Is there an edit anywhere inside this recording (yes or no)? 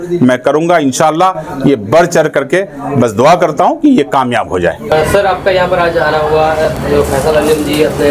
no